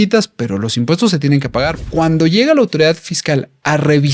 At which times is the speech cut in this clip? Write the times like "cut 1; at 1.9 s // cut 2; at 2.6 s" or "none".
cut 1; at 1.8 s